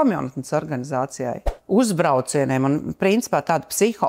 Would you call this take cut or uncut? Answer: cut